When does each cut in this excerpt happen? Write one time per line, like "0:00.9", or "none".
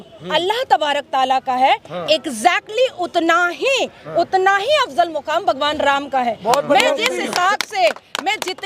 none